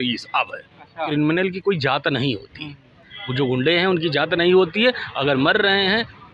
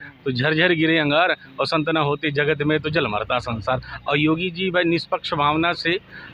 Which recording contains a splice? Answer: first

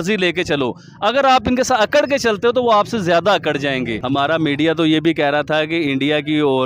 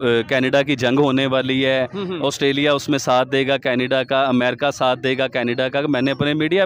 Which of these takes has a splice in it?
first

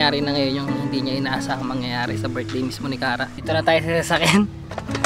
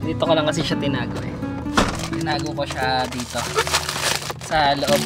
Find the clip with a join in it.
first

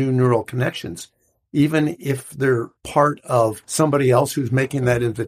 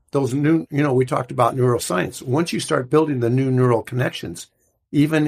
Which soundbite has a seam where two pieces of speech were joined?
first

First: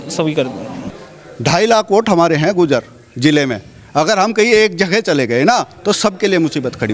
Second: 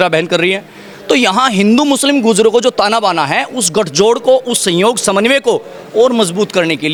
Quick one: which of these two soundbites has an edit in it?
first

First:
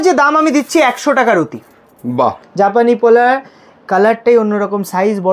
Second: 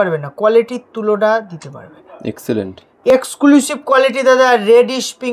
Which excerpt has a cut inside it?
first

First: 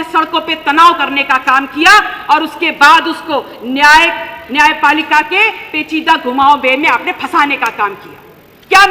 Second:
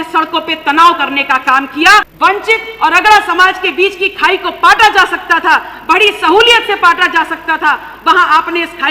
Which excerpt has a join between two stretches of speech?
second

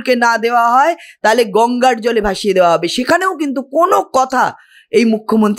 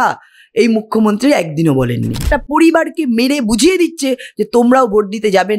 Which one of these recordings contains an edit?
second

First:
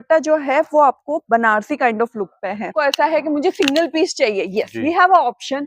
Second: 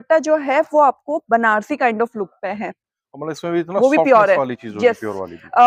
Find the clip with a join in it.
first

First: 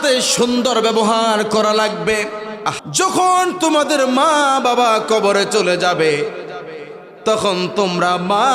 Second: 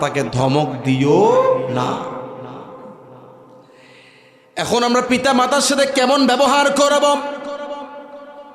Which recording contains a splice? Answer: first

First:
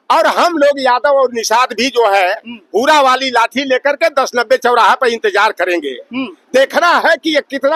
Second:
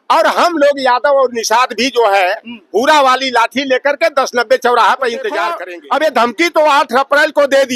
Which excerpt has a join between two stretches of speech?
second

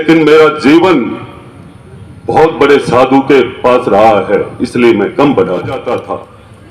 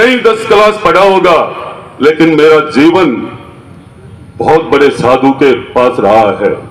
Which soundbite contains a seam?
first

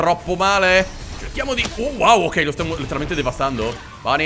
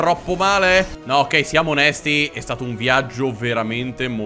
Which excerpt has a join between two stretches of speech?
second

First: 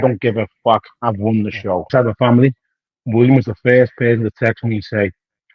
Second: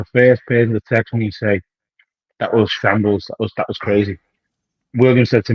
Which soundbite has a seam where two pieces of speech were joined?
first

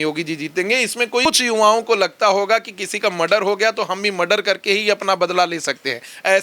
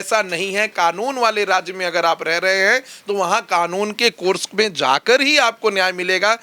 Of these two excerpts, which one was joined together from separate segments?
first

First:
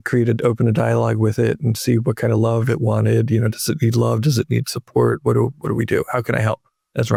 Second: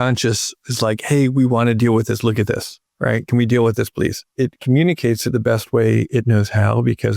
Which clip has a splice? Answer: second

